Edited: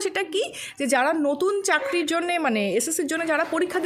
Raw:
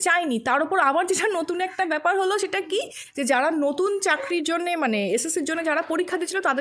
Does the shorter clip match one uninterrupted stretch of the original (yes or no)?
yes